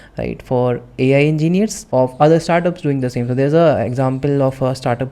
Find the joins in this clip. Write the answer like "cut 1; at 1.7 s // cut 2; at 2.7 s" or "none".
cut 1; at 1.8 s